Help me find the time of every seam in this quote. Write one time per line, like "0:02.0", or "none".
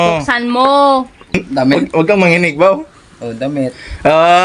0:01.4